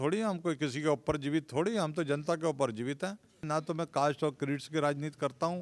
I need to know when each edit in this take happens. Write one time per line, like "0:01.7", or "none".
0:03.4

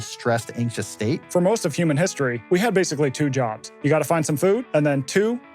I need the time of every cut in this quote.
0:01.2
0:02.4
0:03.6
0:04.6

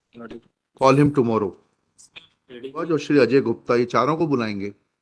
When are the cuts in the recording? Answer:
0:02.9

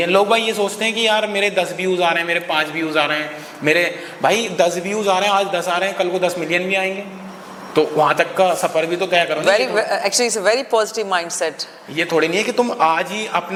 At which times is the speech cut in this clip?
none

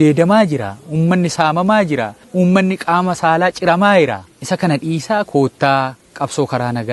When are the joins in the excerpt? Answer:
0:02.2
0:04.3
0:06.0

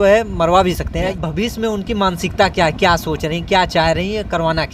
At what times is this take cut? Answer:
0:01.1

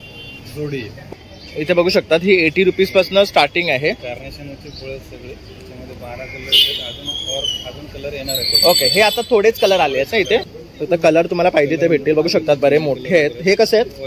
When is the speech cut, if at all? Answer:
0:01.0
0:10.5

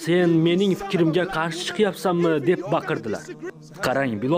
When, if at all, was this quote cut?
0:03.4

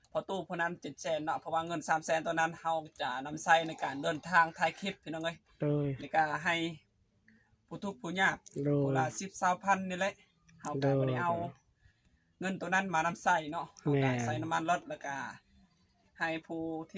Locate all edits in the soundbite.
none

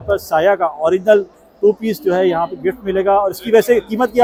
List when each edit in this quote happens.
none

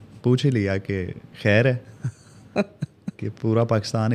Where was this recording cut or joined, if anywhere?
0:01.2

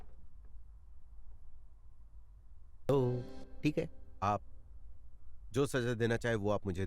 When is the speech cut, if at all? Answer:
0:02.9

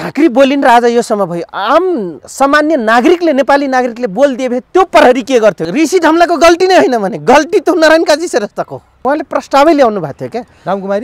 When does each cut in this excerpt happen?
0:05.6
0:09.0

